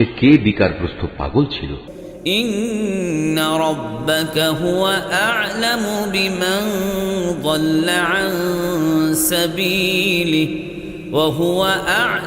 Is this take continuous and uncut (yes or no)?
no